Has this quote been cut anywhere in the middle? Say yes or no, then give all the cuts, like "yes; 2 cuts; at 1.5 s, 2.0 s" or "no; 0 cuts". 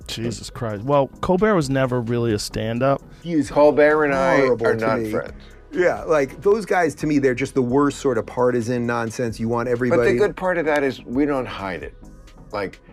yes; 1 cut; at 3.2 s